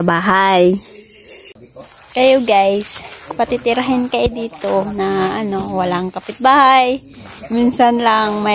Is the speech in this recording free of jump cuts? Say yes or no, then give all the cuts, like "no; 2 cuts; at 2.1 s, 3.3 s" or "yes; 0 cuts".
no; 1 cut; at 1.5 s